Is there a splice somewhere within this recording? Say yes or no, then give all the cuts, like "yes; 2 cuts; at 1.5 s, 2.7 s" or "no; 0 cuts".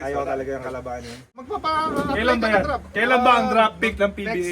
yes; 1 cut; at 1.4 s